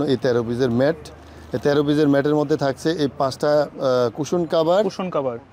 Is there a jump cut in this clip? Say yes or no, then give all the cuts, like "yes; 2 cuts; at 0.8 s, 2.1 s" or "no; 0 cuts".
no; 0 cuts